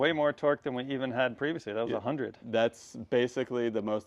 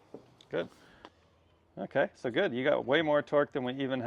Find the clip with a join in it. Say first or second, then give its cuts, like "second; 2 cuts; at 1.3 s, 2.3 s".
second; 1 cut; at 1.2 s